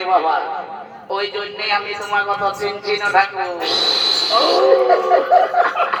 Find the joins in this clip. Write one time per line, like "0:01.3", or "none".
none

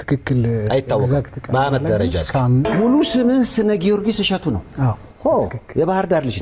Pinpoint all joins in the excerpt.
0:02.7

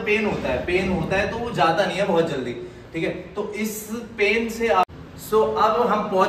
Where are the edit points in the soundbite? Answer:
0:04.8

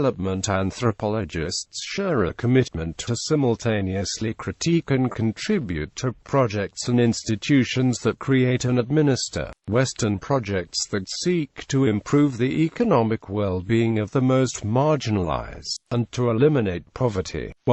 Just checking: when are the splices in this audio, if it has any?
0:01.6
0:04.7

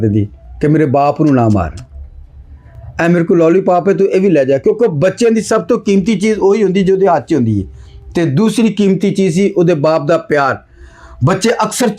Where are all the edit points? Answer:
none

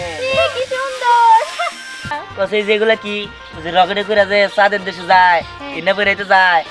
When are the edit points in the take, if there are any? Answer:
0:02.2

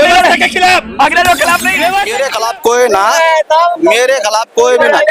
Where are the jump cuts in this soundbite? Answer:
0:02.1

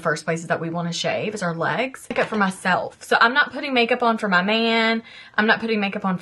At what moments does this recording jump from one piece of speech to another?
0:02.1

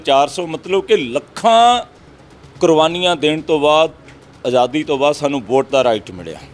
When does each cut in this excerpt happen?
none

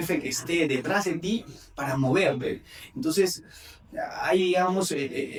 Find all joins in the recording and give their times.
none

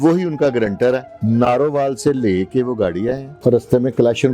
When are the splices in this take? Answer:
0:01.1
0:03.3

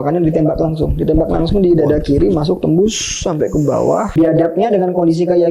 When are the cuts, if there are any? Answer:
0:04.1

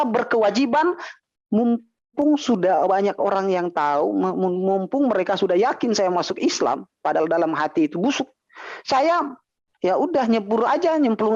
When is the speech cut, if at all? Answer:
none

